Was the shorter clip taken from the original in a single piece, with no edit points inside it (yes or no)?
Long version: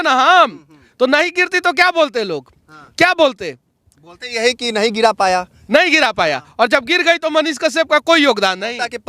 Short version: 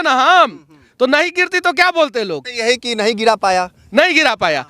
no